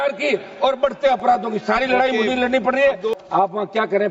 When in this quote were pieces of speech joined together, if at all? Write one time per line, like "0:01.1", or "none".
0:03.1